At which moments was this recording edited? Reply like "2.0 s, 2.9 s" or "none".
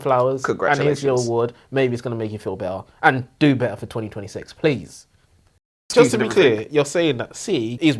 5.8 s